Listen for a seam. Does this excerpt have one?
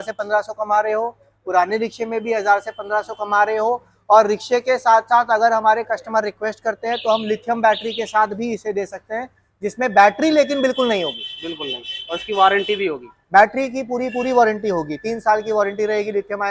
no; 0 cuts

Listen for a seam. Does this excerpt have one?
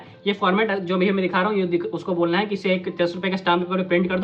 no; 0 cuts

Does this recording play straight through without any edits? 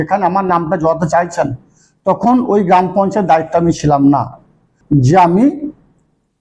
no; 1 cut; at 4.7 s

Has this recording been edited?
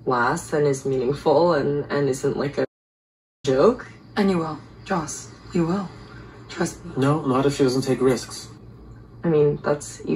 no; 0 cuts

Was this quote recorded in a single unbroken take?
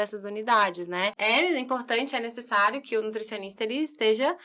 no; 1 cut; at 1.2 s

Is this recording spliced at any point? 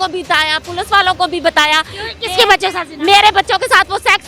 no; 0 cuts

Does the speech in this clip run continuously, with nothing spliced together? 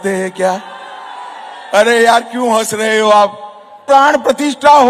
no; 1 cut; at 3.8 s

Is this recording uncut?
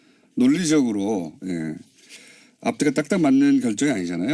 no; 1 cut; at 2.1 s

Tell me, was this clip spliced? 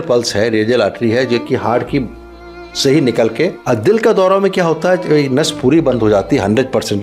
yes; 1 cut; at 3.6 s

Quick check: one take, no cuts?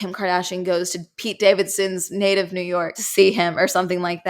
no; 1 cut; at 3.0 s

